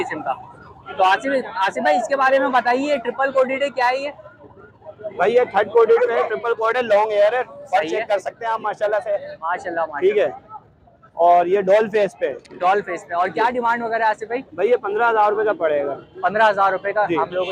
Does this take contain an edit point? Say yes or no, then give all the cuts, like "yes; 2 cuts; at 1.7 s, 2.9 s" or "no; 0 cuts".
no; 0 cuts